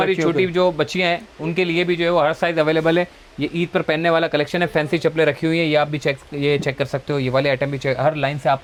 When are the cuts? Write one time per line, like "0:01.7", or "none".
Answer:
none